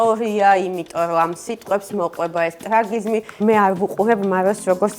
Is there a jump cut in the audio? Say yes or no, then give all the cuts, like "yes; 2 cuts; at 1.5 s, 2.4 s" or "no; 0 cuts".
yes; 1 cut; at 3.4 s